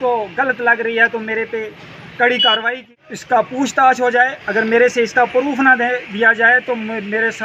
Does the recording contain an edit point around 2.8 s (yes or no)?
yes